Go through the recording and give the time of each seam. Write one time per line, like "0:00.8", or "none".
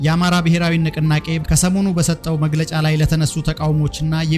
none